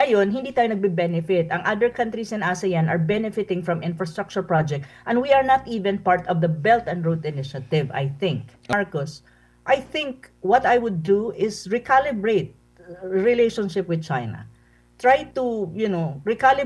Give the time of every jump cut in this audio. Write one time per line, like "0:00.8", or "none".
0:08.7